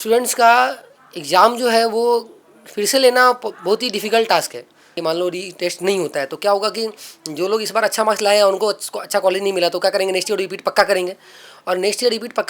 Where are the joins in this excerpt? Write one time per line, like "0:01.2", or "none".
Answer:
0:05.0